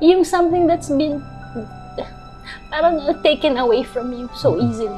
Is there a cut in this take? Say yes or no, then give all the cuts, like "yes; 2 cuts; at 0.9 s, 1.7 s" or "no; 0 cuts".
no; 0 cuts